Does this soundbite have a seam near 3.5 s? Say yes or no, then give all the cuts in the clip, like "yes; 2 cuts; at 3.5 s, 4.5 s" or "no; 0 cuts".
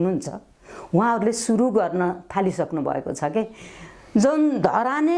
no; 0 cuts